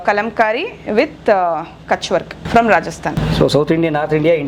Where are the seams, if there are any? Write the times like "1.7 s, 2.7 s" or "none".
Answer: 2.4 s, 3.1 s